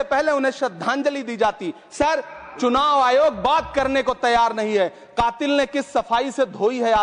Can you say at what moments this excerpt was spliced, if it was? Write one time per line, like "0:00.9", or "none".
none

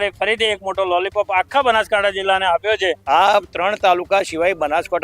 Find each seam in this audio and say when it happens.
0:03.0

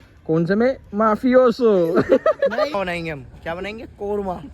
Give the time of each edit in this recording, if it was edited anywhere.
0:02.7

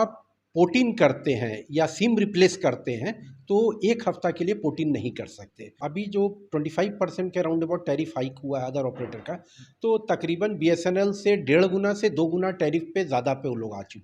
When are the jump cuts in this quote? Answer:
0:05.8

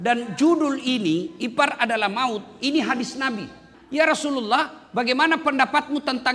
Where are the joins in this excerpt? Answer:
0:03.7

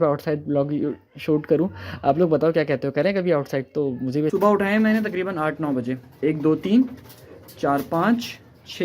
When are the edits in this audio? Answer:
0:04.3

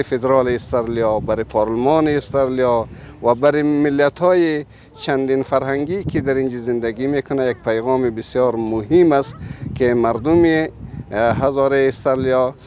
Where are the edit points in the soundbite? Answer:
none

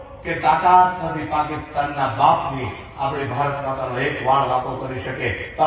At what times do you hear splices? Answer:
none

